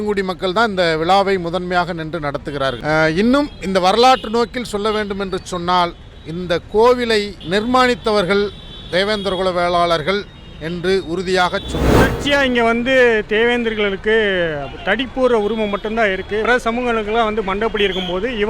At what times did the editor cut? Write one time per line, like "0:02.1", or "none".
0:12.1

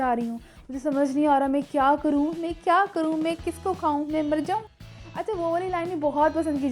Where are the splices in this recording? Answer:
0:04.6

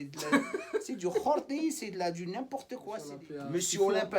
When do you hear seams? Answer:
0:03.1

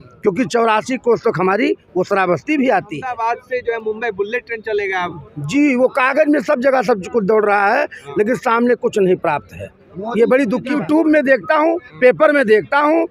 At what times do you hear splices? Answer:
0:03.1
0:10.7

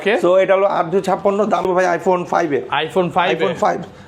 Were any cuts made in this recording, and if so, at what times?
0:01.7

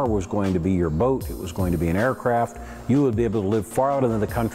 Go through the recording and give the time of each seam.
none

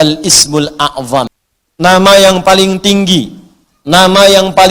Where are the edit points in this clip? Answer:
0:01.3

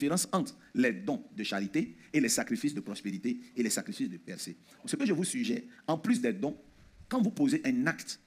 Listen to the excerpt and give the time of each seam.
none

